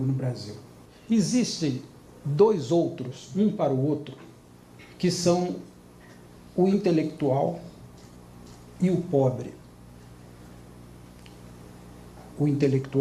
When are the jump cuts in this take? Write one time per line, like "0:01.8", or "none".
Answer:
0:08.9

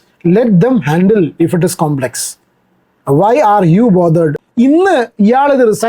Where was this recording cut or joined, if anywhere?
0:04.4

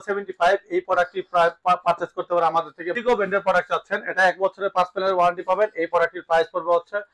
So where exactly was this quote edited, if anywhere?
0:02.9

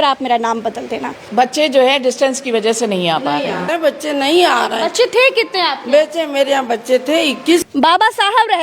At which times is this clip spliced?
0:01.2
0:03.7
0:07.6

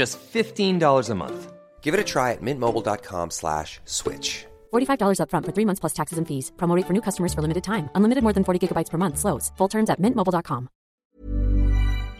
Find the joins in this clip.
0:10.9

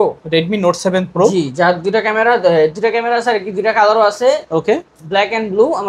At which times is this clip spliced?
none

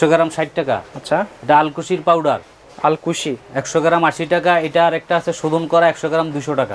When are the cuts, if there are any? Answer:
none

